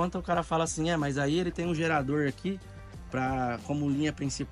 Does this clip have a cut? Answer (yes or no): no